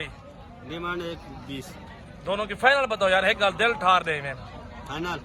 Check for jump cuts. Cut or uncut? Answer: uncut